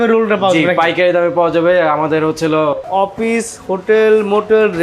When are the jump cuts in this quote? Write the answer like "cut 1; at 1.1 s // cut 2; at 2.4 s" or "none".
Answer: cut 1; at 2.9 s